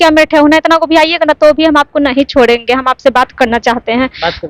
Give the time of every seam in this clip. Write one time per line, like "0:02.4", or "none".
none